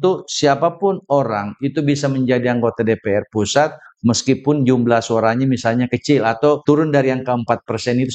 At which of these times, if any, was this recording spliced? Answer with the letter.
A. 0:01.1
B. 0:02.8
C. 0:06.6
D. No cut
C